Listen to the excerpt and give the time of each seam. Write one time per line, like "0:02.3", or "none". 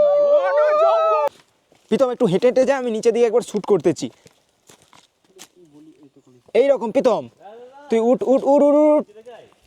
0:01.3